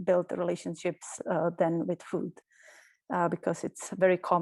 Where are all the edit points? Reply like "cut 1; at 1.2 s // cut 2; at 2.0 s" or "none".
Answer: none